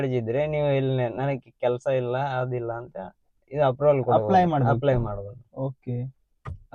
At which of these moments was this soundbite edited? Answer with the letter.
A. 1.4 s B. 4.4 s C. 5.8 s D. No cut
D